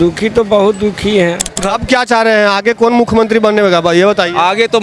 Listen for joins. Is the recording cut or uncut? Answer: cut